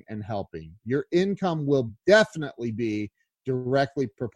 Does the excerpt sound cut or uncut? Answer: cut